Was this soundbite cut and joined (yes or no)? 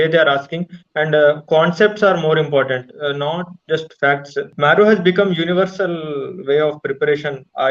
yes